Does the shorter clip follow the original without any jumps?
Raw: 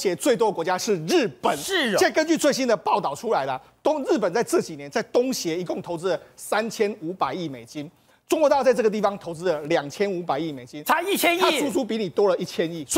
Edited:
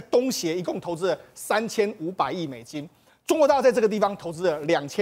yes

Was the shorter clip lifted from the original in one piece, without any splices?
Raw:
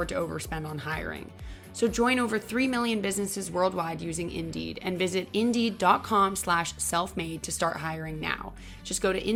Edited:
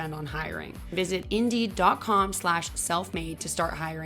no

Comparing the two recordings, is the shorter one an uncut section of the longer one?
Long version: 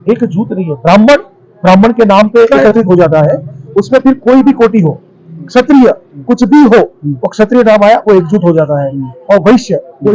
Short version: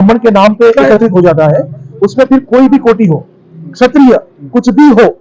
yes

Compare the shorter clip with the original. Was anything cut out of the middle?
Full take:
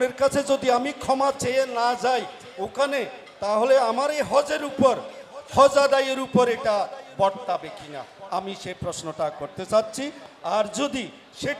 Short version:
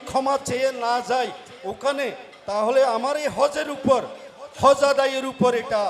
no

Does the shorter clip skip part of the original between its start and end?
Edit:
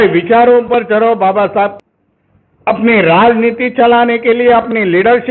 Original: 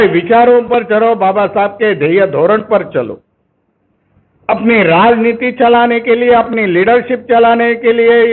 yes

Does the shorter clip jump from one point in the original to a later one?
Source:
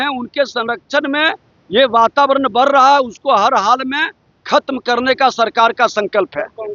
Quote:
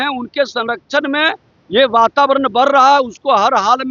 no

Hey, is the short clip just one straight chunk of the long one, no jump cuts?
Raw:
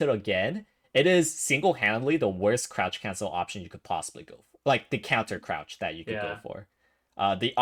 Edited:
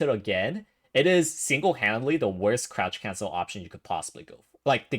yes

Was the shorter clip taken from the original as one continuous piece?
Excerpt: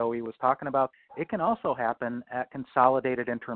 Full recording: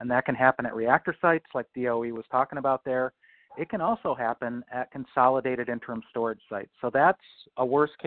no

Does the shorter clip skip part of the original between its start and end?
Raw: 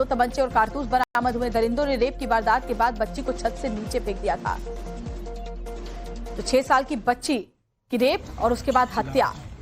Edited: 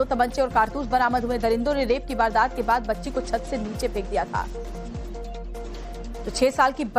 yes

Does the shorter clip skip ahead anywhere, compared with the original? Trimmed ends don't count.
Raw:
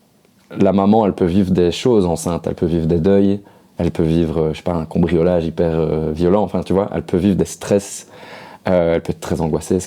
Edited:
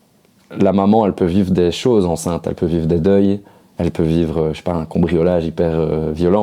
no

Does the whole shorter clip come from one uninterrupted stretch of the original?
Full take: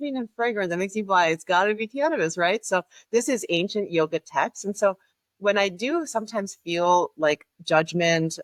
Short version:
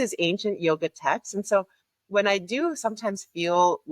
yes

